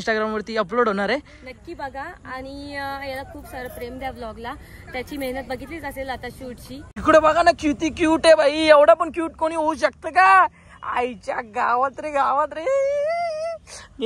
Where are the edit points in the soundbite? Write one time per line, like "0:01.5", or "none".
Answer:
0:06.9